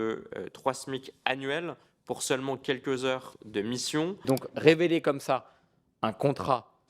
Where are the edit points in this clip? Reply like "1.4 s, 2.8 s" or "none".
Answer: 4.3 s